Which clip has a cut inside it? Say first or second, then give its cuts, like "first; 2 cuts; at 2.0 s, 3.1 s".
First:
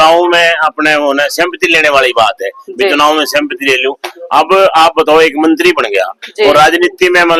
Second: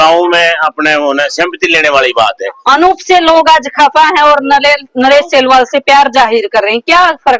second; 2 cuts; at 2.6 s, 3.3 s